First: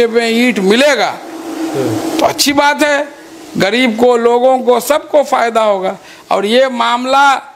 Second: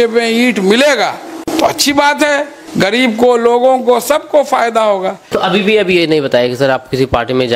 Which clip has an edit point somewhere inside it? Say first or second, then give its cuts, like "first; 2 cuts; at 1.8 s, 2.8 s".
second; 3 cuts; at 1.4 s, 2.6 s, 5.3 s